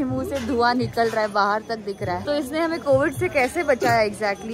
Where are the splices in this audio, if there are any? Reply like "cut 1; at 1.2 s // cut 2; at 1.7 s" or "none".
cut 1; at 2.2 s